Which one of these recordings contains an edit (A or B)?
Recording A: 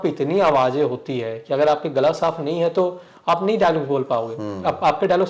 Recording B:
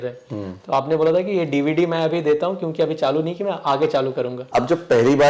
B